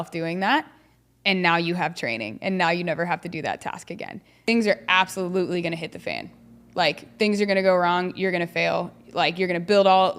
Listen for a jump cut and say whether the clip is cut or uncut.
cut